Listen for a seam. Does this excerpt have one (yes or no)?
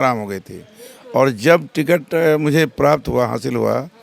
no